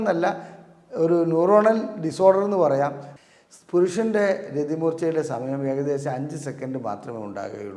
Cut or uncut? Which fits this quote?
cut